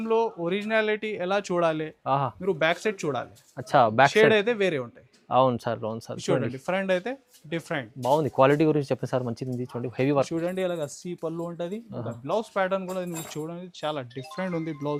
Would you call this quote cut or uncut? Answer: uncut